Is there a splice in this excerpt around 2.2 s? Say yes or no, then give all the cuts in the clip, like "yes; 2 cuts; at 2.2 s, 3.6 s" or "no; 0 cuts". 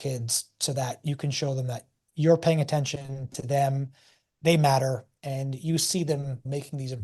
no; 0 cuts